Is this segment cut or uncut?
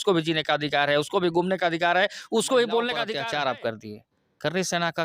cut